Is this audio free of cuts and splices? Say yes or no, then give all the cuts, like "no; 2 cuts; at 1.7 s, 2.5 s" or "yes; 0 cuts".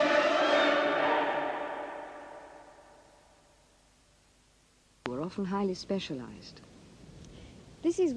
yes; 0 cuts